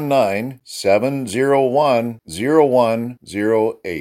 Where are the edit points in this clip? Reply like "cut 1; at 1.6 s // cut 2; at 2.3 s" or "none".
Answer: none